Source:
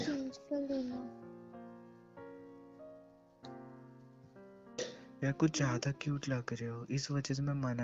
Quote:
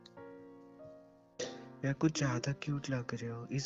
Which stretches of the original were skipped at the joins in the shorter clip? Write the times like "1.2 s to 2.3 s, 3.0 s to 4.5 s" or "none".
3.4 s to 4.7 s